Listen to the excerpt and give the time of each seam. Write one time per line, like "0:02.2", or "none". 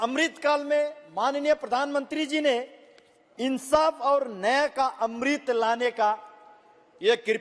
none